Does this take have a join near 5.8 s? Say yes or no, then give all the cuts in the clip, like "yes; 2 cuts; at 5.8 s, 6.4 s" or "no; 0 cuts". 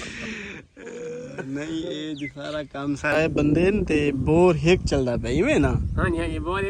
no; 1 cut; at 3.2 s